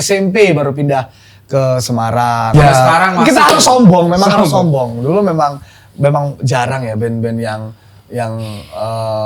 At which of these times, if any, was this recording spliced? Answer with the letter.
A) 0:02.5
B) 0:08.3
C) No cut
A